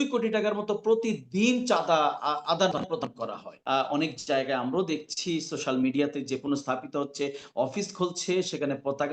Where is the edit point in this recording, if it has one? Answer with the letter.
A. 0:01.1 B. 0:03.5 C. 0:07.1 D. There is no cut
B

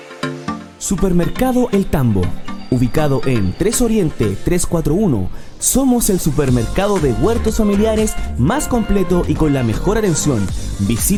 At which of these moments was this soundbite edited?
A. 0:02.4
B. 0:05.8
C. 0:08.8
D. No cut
D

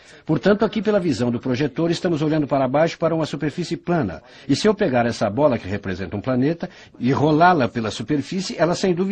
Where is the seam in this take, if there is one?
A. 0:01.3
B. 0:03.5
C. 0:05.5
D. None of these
D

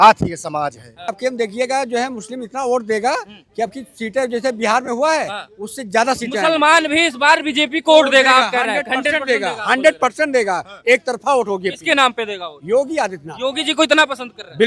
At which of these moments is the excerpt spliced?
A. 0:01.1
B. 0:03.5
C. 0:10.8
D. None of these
A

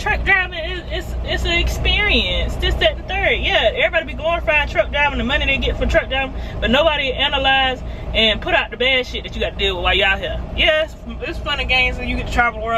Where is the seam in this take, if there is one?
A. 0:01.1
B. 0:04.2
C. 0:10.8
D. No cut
D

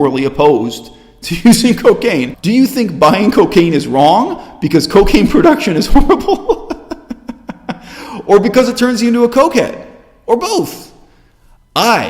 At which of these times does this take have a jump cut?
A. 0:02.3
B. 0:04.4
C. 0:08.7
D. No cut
A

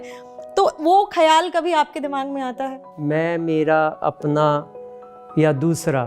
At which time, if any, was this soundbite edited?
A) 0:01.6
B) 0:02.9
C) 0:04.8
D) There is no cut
B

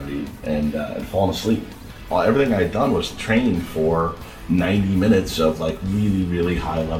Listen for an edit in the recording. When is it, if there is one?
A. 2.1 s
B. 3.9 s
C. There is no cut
A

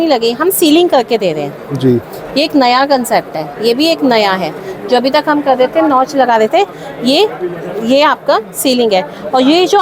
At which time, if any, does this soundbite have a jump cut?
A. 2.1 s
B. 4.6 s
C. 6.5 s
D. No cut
D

